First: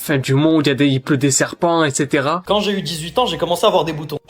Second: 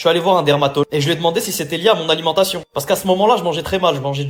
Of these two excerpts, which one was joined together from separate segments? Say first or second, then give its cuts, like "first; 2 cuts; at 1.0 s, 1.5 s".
first; 1 cut; at 2.4 s